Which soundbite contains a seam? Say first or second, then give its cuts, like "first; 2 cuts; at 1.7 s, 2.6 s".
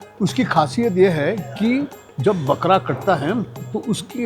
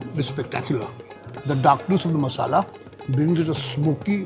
first; 1 cut; at 2.0 s